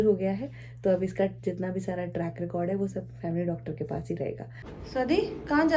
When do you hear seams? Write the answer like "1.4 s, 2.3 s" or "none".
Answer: 4.7 s